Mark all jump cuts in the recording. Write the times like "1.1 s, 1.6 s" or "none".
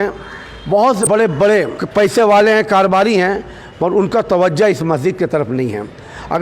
1.0 s, 1.8 s